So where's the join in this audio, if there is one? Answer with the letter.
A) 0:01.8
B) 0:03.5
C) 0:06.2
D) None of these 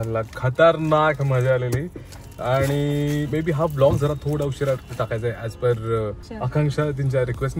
C